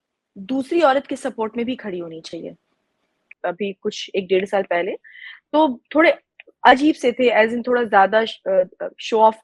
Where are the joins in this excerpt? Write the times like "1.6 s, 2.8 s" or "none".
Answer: 3.3 s